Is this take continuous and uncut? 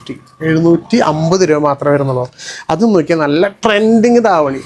yes; 0 cuts

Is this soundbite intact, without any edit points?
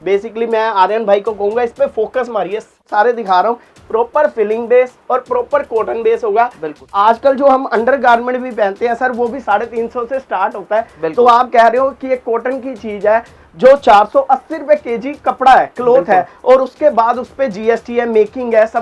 no; 2 cuts; at 2.8 s, 6.8 s

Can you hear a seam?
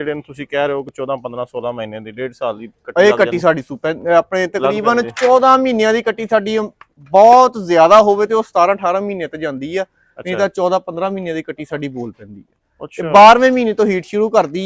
no; 0 cuts

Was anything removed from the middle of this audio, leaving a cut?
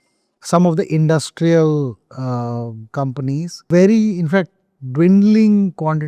yes; 1 cut; at 3.6 s

